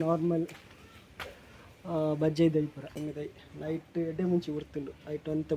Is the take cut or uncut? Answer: cut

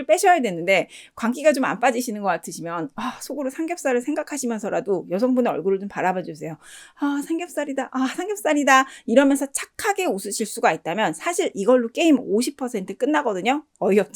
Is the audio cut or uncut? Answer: uncut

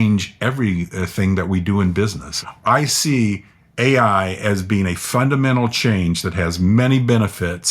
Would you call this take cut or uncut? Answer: cut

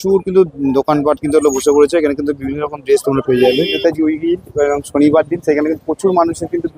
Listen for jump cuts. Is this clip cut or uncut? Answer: cut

